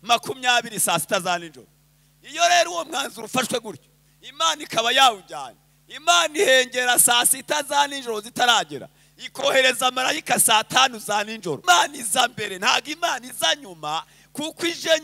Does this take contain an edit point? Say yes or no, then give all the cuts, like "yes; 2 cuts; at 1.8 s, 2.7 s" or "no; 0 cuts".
yes; 1 cut; at 11.6 s